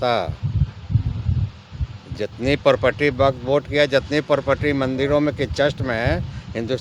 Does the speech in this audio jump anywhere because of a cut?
no; 0 cuts

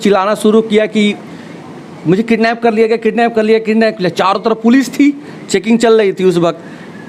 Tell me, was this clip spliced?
no; 0 cuts

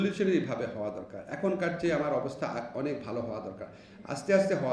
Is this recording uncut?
yes; 0 cuts

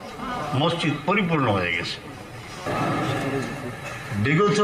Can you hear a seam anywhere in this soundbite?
yes; 1 cut; at 2.7 s

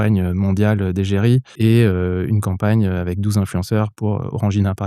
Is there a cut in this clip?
yes; 1 cut; at 1.5 s

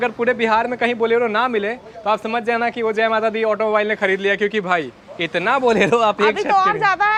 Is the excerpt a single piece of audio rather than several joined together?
yes; 0 cuts

